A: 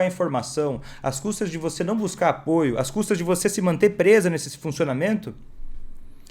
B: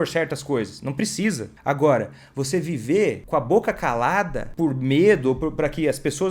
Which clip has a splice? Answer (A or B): B